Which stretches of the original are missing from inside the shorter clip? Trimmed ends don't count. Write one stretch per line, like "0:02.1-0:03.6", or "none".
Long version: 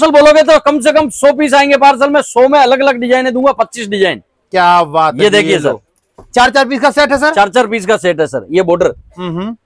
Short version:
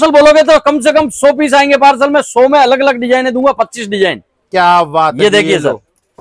none

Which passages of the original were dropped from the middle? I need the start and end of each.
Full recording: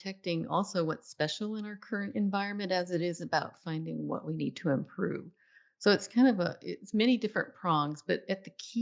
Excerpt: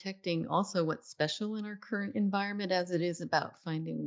none

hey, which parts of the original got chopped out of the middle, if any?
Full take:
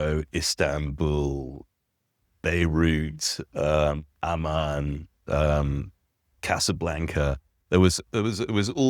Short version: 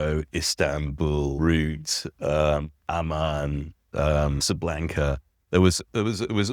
0:01.4-0:02.7
0:05.8-0:06.6

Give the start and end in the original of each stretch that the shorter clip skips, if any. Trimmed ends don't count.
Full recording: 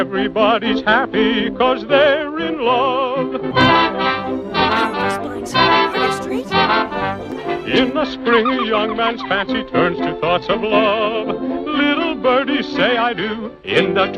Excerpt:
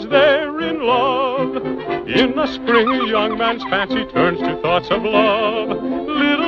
0:03.5-0:07.3

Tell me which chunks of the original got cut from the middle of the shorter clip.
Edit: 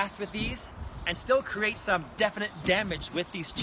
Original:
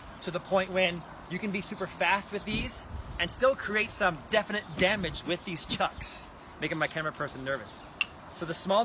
none

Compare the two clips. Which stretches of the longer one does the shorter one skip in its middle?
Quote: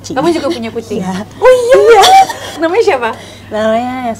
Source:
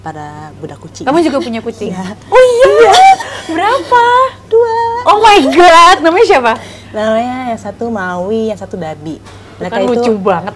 0:03.5-0:06.0

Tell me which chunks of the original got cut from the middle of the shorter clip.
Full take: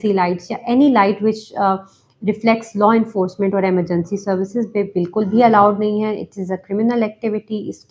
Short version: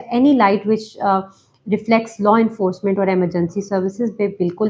none

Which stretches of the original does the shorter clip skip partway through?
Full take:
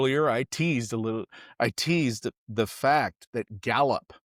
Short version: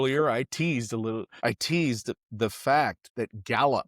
0:01.3-0:01.5

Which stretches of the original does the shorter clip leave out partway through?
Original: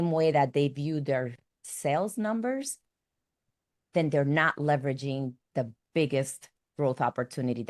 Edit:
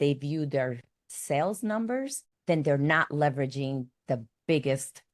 0:02.8-0:03.7

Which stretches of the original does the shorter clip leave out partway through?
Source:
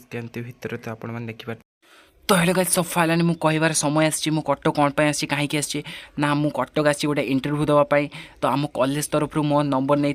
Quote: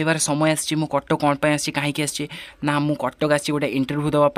none

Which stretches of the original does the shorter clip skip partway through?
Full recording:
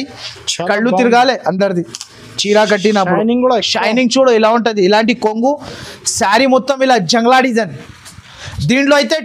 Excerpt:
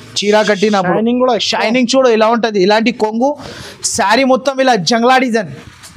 none

